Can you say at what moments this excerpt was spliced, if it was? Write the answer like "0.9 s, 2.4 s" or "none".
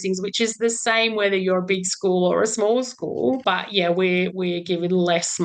3.4 s, 4.3 s